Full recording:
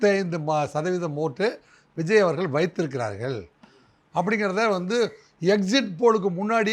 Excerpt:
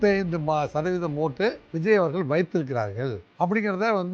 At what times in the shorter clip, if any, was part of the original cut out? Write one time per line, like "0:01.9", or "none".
0:01.7
0:03.2